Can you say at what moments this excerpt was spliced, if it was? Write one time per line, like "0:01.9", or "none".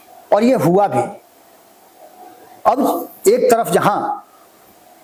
none